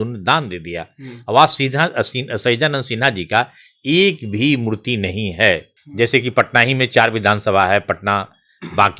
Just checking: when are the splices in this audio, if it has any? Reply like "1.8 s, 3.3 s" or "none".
5.8 s